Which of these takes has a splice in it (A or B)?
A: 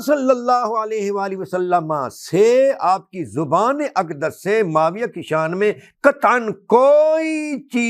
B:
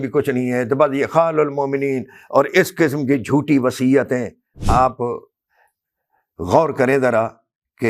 B